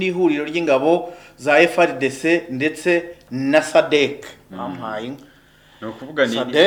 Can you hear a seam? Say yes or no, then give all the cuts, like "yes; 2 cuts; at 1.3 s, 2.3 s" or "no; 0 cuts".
no; 0 cuts